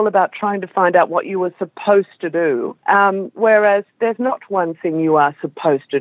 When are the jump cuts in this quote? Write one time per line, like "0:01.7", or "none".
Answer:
0:02.7